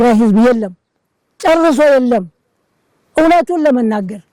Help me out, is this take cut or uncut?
uncut